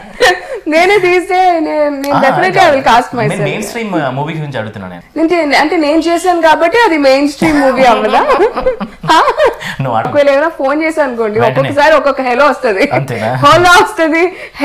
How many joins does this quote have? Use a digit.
2